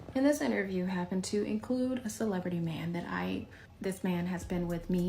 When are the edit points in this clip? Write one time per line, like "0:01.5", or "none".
0:03.6